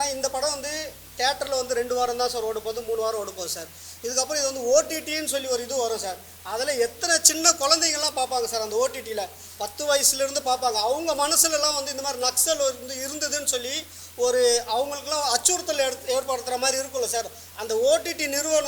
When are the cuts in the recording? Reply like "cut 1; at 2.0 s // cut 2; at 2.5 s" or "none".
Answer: none